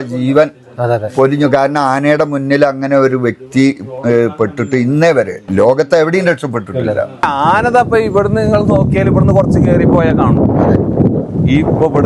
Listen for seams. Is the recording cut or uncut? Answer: cut